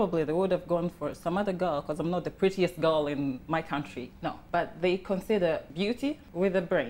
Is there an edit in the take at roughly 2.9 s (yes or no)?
no